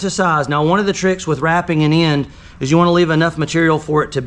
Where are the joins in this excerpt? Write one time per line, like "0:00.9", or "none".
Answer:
none